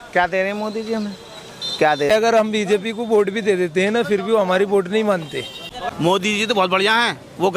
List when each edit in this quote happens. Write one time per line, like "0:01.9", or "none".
0:02.1
0:05.8

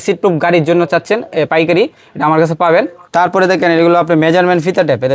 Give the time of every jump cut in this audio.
0:03.0

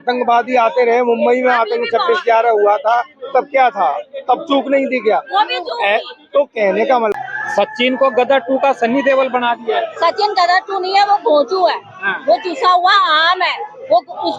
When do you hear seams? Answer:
0:07.1

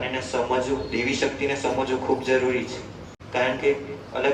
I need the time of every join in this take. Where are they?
none

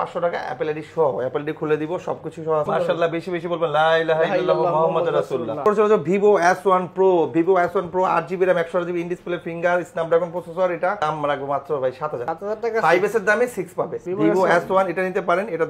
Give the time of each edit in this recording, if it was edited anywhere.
0:02.7
0:05.6
0:11.0
0:14.1

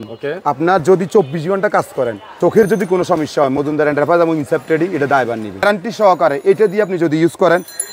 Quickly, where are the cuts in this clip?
0:02.4
0:05.6

